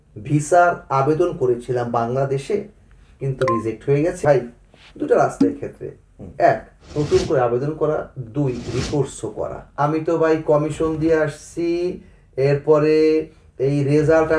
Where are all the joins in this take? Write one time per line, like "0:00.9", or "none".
0:04.2
0:09.6